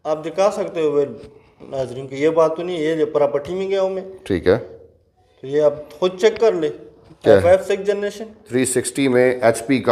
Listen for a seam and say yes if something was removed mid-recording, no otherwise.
yes